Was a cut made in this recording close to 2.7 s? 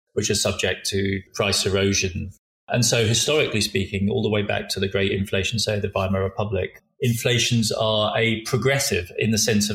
yes; 3 cuts; at 1.3 s, 2.7 s, 6.8 s

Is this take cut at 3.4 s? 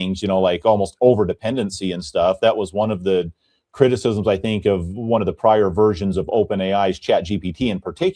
no; 0 cuts

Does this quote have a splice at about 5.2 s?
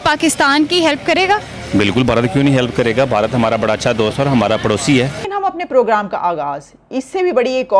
yes; 1 cut; at 5.2 s

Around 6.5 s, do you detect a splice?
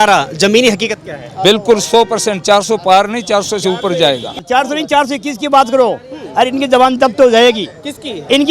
no; 1 cut; at 4.4 s

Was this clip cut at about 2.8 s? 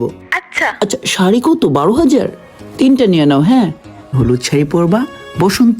no; 1 cut; at 4.1 s

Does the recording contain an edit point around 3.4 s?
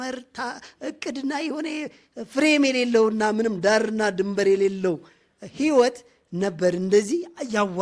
no; 0 cuts

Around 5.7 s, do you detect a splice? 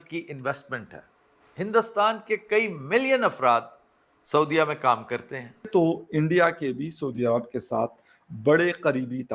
yes; 1 cut; at 5.7 s

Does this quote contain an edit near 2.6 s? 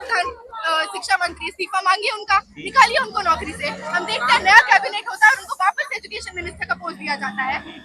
no; 0 cuts

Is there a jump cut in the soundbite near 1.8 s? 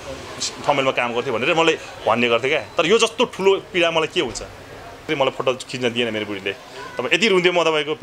no; 1 cut; at 5.1 s

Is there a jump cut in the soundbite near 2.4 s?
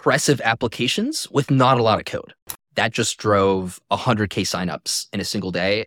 yes; 1 cut; at 2.4 s

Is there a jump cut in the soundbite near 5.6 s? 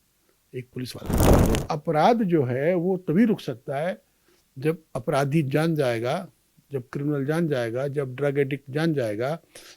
no; 1 cut; at 1.2 s

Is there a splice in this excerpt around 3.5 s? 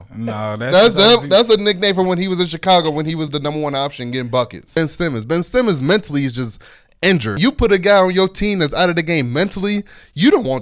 no; 2 cuts; at 4.8 s, 7.4 s

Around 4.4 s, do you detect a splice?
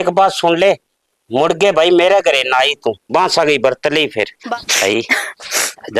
yes; 1 cut; at 4.4 s

